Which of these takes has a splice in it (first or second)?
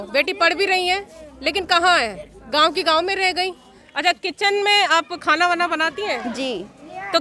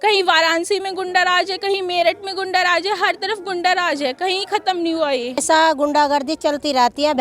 second